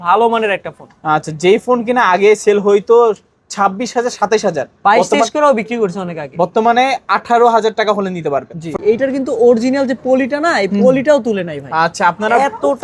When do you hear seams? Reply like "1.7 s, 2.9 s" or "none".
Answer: 8.7 s

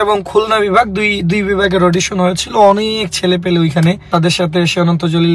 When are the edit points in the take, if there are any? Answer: 4.1 s

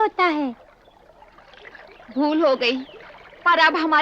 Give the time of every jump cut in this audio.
1.9 s

